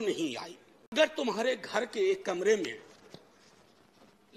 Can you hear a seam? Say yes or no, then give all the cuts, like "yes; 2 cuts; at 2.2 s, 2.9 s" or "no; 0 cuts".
yes; 1 cut; at 0.9 s